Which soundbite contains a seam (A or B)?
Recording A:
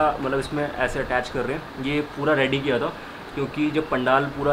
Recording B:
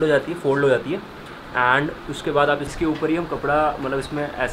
B